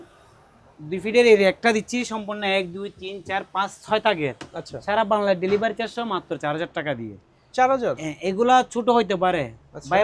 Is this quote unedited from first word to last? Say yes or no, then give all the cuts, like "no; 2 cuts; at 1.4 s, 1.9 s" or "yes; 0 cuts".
yes; 0 cuts